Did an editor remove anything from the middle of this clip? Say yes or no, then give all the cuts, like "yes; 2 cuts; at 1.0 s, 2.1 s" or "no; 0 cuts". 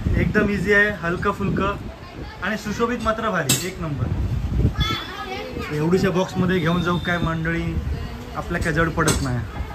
no; 0 cuts